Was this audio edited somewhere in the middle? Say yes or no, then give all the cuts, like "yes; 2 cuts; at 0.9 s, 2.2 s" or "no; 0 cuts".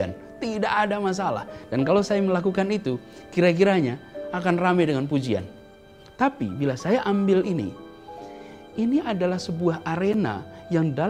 no; 0 cuts